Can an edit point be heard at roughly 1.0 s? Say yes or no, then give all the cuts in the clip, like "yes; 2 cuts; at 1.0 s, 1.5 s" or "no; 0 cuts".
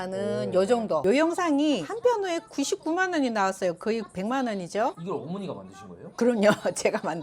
yes; 1 cut; at 1.0 s